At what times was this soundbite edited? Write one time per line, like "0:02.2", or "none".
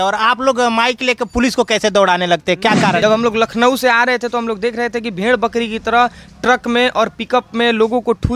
0:03.0